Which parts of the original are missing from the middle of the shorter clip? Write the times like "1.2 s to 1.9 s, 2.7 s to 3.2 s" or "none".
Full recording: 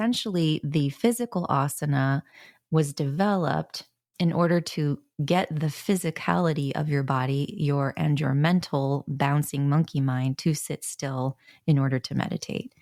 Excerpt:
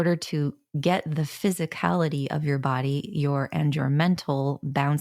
none